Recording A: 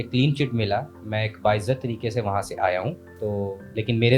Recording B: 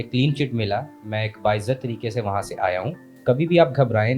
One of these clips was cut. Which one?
A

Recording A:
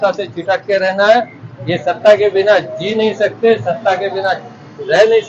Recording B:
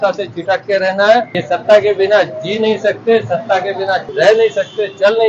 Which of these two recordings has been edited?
B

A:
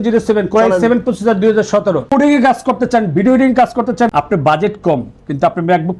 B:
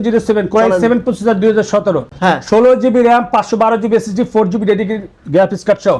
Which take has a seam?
A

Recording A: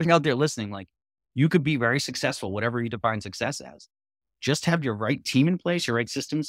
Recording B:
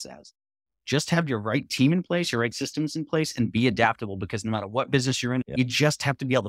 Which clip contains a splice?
B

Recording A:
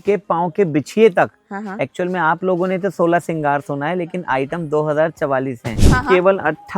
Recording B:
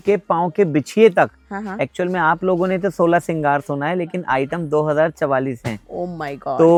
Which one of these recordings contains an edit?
A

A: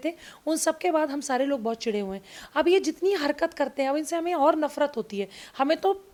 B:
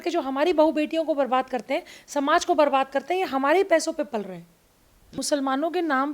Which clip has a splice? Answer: B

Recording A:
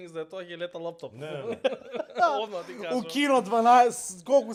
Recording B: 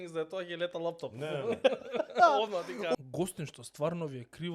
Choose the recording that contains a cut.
B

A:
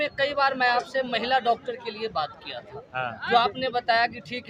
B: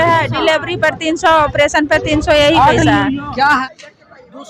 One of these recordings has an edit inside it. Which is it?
B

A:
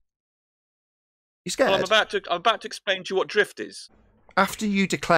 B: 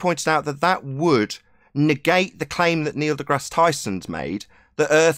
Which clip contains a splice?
A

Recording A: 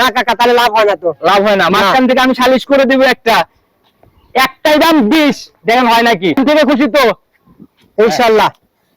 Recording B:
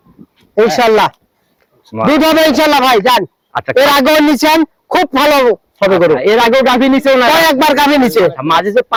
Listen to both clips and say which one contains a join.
A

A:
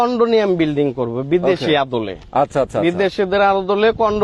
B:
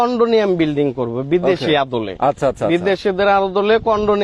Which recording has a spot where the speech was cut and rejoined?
B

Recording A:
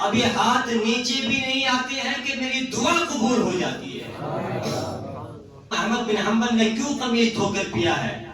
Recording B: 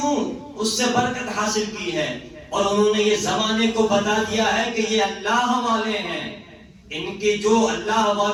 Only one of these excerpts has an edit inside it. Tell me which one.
A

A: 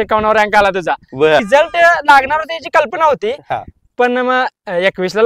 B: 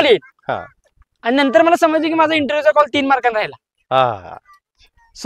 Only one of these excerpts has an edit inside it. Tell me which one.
A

